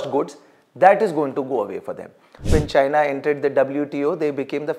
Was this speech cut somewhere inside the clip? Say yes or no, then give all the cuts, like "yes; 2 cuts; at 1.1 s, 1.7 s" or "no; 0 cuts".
yes; 1 cut; at 2.5 s